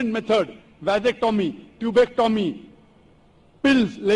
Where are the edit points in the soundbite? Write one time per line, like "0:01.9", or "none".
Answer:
none